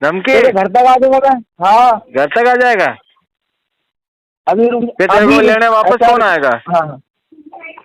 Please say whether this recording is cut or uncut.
uncut